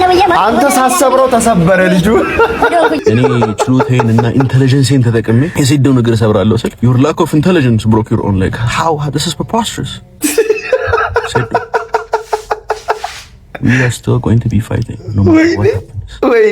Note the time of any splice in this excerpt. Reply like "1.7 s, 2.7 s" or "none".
3.0 s, 5.5 s, 6.7 s